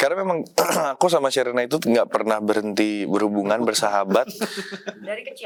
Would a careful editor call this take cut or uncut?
uncut